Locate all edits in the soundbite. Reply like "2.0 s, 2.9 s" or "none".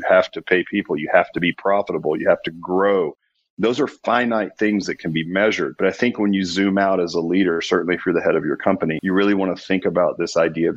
none